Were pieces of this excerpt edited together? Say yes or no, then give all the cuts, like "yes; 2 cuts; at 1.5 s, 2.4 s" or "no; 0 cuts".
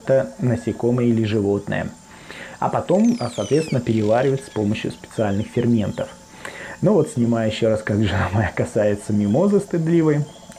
no; 0 cuts